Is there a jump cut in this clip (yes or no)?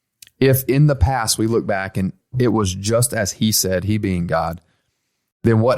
yes